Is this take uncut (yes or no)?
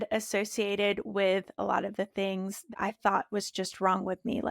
no